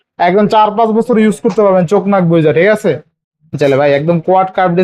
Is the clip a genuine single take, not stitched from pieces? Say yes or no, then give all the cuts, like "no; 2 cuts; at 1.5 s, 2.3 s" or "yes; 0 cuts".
no; 1 cut; at 3.5 s